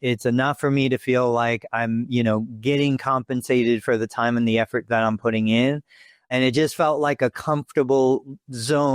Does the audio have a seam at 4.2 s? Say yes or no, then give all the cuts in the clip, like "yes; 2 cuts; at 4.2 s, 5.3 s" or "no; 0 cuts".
no; 1 cut; at 6.3 s